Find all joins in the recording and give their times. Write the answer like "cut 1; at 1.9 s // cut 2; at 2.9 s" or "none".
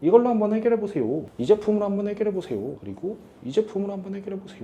none